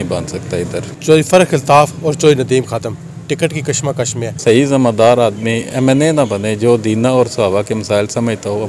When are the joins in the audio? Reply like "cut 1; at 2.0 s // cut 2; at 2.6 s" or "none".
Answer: cut 1; at 0.9 s // cut 2; at 4.3 s